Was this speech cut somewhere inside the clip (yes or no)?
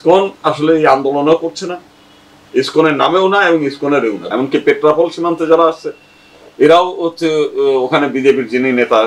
yes